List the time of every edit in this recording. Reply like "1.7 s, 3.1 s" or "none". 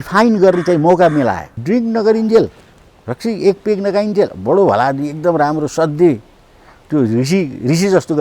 1.5 s